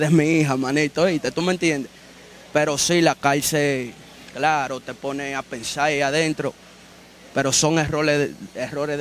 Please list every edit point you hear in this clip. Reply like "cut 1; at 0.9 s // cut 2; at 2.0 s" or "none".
none

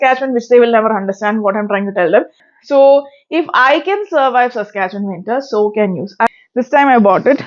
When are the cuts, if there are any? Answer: cut 1; at 2.4 s // cut 2; at 6.3 s

